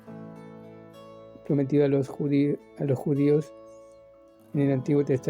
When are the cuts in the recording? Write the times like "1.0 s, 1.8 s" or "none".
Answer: 1.4 s